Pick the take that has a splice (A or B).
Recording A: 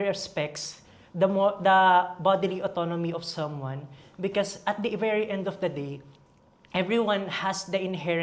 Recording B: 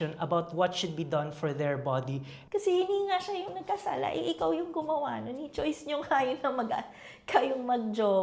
B